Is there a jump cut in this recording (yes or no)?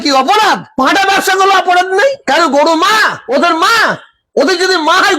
yes